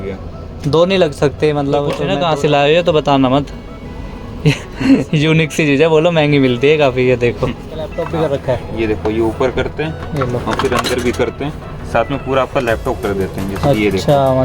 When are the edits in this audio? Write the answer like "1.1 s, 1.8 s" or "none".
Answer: 2.0 s, 8.0 s